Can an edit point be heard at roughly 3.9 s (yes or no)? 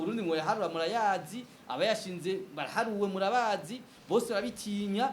yes